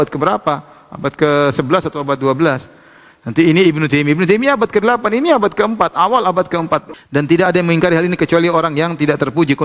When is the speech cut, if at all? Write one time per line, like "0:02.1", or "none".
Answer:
0:06.9